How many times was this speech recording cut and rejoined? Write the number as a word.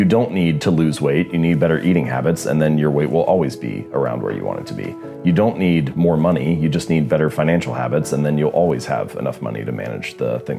zero